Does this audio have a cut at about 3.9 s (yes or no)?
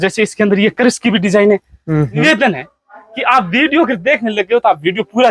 no